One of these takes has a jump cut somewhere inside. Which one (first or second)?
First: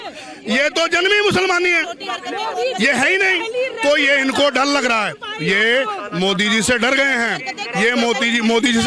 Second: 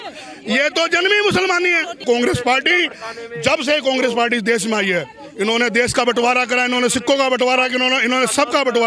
second